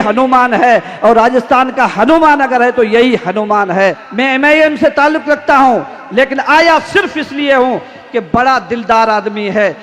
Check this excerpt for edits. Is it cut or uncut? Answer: cut